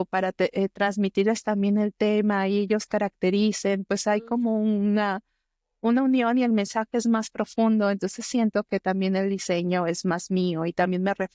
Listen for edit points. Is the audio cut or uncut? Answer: uncut